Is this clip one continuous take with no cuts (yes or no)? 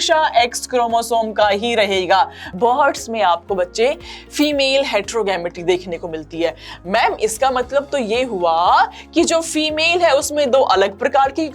no